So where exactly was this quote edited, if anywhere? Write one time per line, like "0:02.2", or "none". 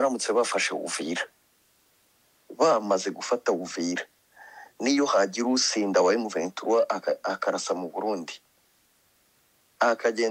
none